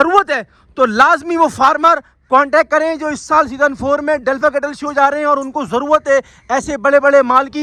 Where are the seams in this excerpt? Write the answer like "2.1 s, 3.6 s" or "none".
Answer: none